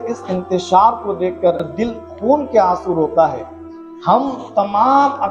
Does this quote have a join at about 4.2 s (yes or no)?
no